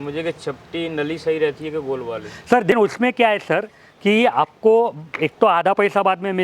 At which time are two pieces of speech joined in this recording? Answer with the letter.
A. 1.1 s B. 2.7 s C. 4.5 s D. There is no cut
B